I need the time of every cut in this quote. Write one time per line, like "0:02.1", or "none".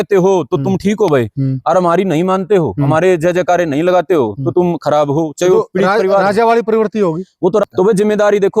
0:07.6